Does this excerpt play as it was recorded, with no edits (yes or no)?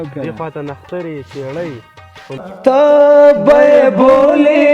no